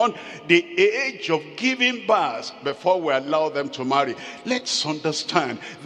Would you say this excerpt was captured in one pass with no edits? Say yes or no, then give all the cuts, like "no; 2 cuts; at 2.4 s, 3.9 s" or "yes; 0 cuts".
yes; 0 cuts